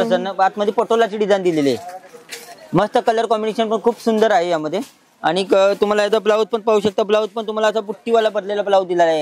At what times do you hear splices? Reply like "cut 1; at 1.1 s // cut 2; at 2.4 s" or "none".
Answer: none